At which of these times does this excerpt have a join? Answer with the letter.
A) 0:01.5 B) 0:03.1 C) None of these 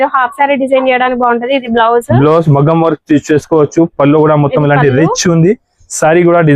C